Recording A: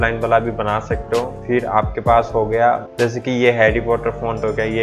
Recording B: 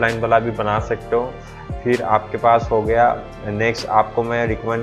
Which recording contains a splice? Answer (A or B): A